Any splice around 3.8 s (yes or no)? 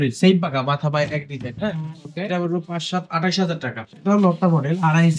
yes